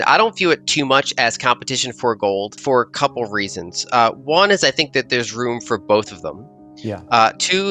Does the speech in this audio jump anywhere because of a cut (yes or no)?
yes